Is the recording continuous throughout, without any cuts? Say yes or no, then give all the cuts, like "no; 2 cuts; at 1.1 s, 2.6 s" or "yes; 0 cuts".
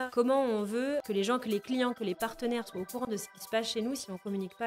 no; 1 cut; at 1.0 s